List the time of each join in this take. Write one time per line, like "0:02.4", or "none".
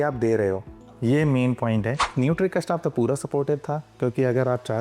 0:02.0